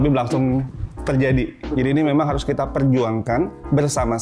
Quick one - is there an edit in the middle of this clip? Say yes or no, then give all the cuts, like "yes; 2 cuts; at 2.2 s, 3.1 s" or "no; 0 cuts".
no; 0 cuts